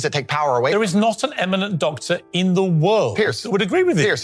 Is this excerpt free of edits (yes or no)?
yes